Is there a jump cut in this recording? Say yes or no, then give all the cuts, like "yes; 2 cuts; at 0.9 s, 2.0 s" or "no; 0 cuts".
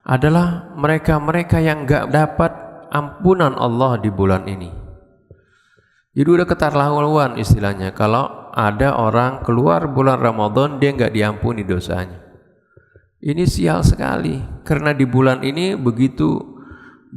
no; 0 cuts